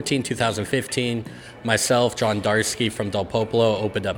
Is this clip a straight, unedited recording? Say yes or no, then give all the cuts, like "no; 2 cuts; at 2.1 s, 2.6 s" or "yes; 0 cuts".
yes; 0 cuts